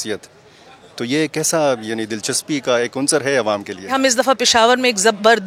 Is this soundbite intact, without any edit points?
no; 1 cut; at 3.8 s

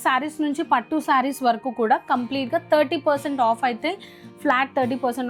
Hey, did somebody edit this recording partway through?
no; 0 cuts

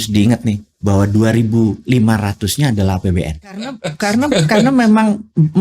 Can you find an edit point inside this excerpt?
yes; 1 cut; at 3.9 s

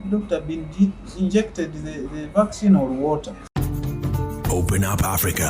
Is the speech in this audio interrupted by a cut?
yes; 1 cut; at 3.5 s

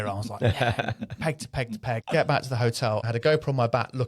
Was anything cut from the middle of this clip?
yes; 2 cuts; at 2.0 s, 3.0 s

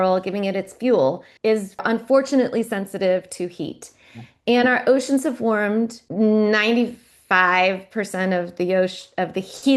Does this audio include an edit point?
yes; 2 cuts; at 1.8 s, 6.0 s

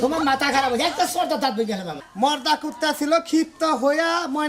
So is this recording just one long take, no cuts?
no; 1 cut; at 2.1 s

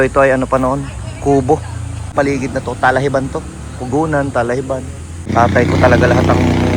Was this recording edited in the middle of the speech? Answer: yes; 2 cuts; at 2.1 s, 5.2 s

